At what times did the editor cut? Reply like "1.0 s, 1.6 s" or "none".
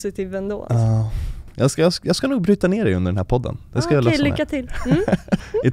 4.7 s